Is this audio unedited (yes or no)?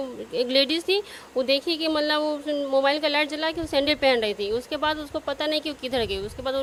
yes